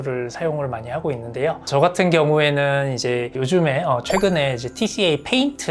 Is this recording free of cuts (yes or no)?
yes